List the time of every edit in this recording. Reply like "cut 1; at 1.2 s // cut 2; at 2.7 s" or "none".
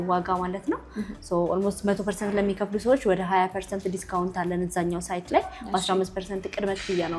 none